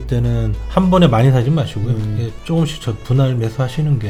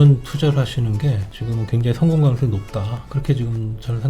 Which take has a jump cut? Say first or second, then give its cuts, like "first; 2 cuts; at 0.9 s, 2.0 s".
second; 1 cut; at 1.3 s